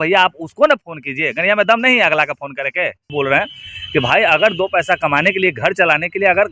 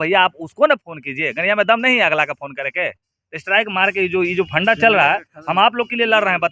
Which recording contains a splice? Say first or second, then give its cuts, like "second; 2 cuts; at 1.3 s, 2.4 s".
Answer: first; 1 cut; at 3.1 s